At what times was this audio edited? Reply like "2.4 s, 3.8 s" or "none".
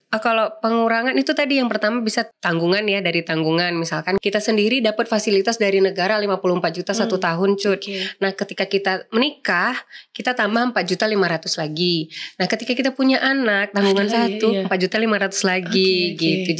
2.3 s, 4.2 s